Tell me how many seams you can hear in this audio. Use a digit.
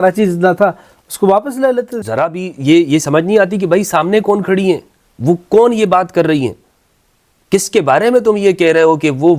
1